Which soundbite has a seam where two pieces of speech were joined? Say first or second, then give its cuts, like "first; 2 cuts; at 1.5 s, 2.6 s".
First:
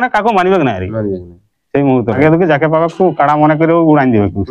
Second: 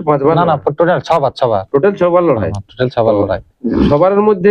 first; 1 cut; at 2.2 s